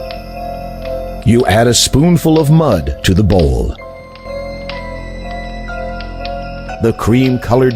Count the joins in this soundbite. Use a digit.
3